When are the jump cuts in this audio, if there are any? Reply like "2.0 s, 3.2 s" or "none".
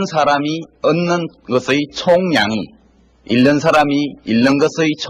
1.1 s